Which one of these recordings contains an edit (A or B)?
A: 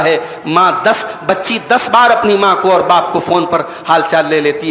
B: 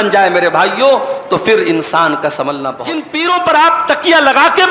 B